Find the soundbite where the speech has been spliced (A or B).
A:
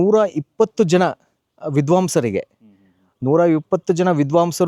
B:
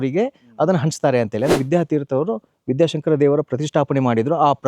B